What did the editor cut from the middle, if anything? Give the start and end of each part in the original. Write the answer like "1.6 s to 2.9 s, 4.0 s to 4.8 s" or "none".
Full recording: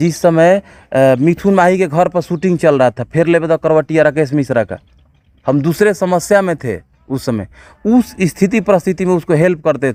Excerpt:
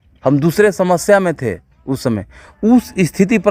none